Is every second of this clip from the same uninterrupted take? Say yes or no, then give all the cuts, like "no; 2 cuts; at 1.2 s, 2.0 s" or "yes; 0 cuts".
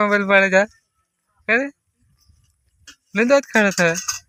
yes; 0 cuts